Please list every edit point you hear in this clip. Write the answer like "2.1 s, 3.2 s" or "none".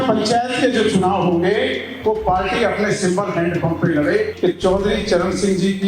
4.3 s